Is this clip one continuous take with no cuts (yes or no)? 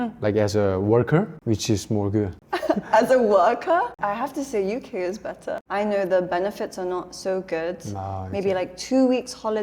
no